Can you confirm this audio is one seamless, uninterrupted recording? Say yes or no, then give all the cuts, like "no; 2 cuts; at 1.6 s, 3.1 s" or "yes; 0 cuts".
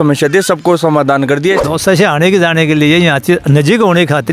no; 1 cut; at 1.6 s